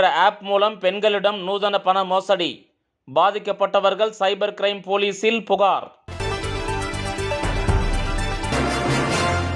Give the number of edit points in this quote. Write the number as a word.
one